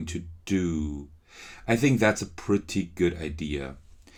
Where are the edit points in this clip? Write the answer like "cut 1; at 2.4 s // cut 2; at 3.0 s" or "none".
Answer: none